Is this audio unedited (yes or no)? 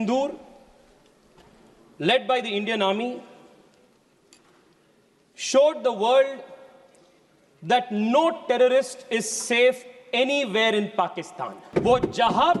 no